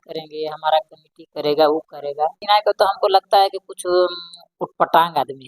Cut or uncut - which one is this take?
cut